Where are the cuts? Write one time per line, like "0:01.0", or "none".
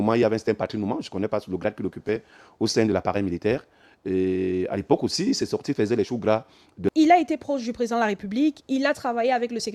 0:06.9

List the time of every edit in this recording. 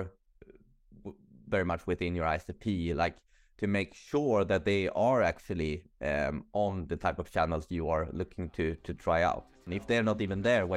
0:09.7

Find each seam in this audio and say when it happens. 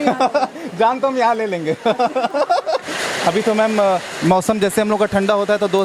0:02.9

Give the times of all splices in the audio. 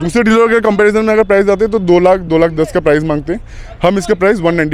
none

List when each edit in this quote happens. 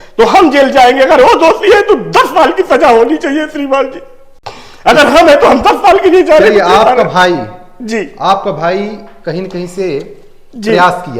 none

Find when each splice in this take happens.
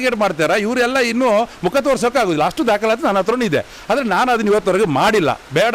none

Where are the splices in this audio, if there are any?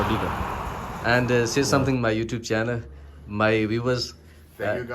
0:01.3

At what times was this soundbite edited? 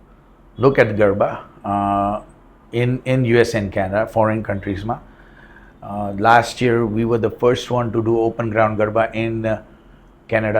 none

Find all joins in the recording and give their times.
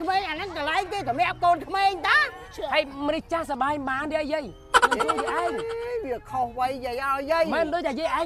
none

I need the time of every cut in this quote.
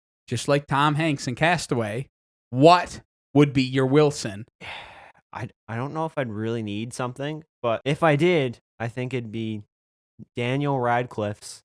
0:04.5
0:07.8

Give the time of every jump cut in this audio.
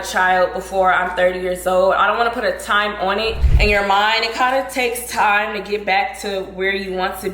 0:03.4

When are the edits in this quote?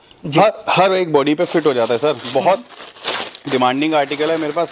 none

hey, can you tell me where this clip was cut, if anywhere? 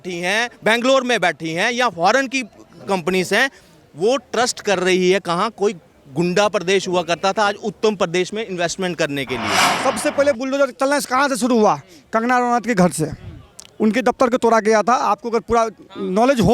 0:09.7

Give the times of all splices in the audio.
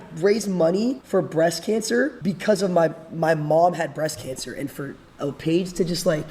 0:01.0
0:02.2

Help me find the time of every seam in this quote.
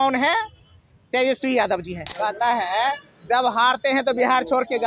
0:02.0

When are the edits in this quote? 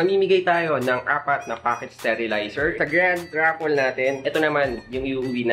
0:02.8
0:04.2

